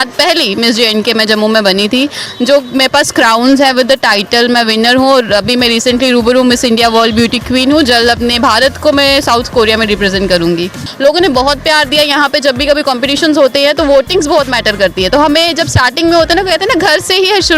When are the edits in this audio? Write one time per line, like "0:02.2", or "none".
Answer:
0:02.2
0:10.8